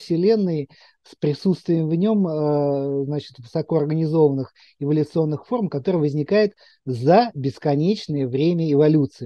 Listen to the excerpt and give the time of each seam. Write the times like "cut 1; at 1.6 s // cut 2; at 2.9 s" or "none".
none